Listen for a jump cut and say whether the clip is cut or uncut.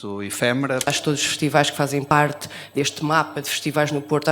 cut